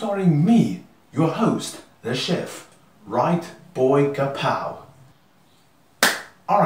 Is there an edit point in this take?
no; 0 cuts

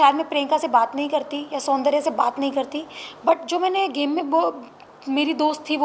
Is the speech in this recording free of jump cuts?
yes; 0 cuts

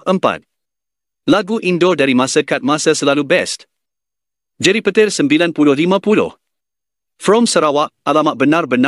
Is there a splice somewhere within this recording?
no; 0 cuts

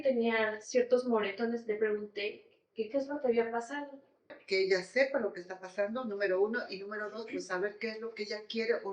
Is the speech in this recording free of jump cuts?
no; 1 cut; at 4.4 s

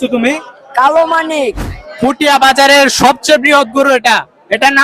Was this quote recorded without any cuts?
no; 1 cut; at 1.6 s

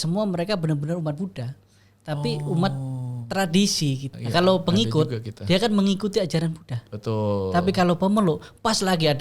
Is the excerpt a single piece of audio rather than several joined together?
no; 1 cut; at 4.2 s

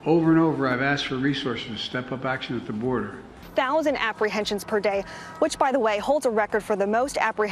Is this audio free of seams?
no; 1 cut; at 3.4 s

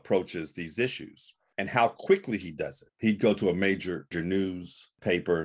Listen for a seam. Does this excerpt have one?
yes; 2 cuts; at 2.9 s, 4.1 s

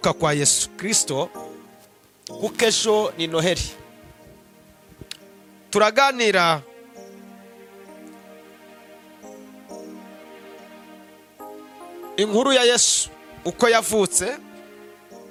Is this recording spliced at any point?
no; 0 cuts

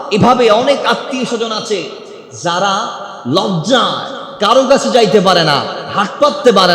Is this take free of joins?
yes; 0 cuts

